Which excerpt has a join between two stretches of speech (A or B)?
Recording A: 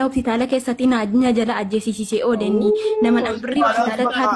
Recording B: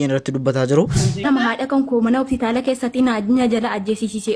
B